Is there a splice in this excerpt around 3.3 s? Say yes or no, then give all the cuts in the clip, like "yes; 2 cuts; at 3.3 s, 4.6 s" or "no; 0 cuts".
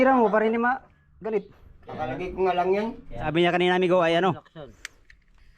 yes; 1 cut; at 3.3 s